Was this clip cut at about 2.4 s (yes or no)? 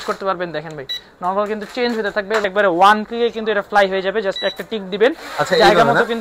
yes